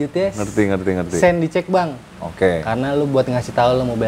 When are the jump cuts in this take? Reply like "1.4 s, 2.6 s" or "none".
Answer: none

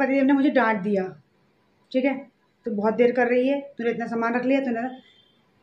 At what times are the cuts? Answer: none

